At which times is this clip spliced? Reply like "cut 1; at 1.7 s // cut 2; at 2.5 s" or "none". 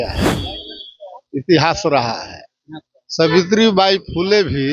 none